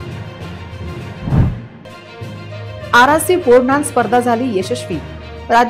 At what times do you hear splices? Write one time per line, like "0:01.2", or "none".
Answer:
0:00.9